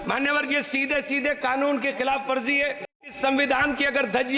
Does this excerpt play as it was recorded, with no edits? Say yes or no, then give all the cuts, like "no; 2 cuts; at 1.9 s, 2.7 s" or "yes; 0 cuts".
no; 1 cut; at 3.1 s